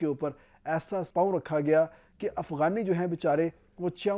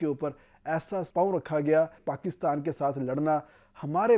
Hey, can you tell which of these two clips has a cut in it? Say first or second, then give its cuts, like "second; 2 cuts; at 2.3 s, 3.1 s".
second; 1 cut; at 2.0 s